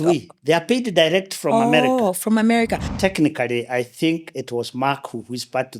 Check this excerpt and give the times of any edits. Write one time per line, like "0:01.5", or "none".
0:02.8